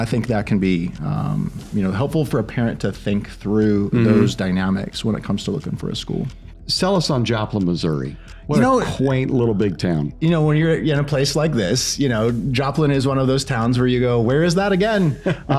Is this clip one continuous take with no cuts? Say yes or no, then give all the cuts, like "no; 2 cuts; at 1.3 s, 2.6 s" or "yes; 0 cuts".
no; 1 cut; at 6.4 s